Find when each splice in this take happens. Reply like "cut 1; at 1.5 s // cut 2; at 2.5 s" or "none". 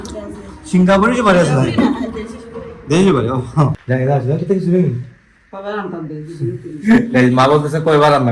cut 1; at 3.8 s